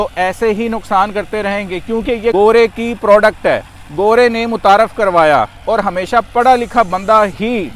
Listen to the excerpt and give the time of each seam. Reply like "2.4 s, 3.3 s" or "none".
2.3 s